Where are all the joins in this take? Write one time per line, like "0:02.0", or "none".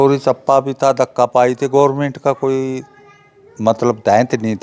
none